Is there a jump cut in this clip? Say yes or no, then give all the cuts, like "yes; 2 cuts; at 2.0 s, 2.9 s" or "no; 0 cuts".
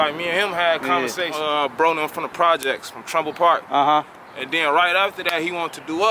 yes; 1 cut; at 1.4 s